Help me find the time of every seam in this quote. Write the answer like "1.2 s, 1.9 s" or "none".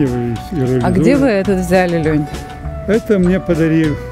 none